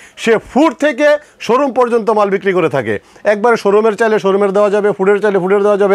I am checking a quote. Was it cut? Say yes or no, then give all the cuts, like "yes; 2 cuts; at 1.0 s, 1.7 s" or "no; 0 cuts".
no; 0 cuts